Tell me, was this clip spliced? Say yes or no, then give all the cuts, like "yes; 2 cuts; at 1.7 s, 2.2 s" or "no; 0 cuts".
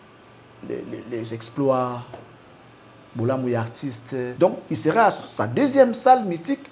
yes; 1 cut; at 4.3 s